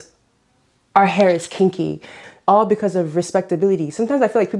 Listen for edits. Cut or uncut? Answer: cut